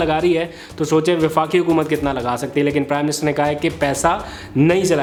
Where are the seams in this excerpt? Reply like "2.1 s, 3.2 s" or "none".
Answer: none